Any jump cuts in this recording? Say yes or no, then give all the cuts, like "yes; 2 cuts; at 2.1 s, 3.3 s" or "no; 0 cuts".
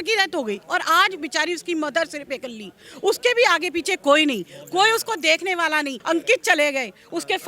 yes; 1 cut; at 6.0 s